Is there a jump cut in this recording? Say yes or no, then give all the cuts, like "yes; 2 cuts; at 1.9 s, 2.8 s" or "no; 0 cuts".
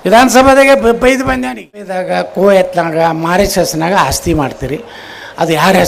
yes; 1 cut; at 2.0 s